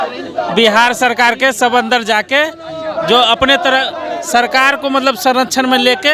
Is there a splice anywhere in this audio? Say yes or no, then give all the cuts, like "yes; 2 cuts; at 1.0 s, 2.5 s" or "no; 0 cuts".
no; 0 cuts